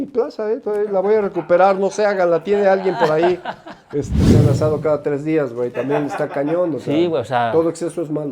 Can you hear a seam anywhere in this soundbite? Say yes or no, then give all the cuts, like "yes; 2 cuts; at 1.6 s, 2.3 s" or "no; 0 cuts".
yes; 1 cut; at 4.1 s